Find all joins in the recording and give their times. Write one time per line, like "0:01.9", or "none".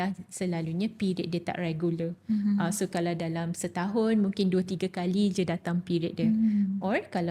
none